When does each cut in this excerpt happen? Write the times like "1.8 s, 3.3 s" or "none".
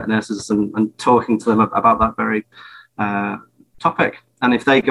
none